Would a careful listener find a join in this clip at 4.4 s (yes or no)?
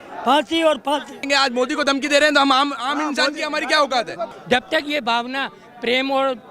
yes